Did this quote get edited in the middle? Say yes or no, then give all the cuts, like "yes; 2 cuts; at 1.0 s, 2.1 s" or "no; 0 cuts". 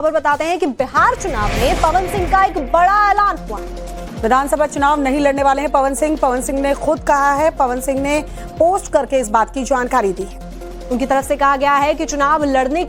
no; 0 cuts